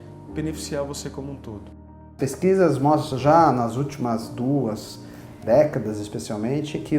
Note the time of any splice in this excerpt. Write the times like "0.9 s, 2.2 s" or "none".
2.1 s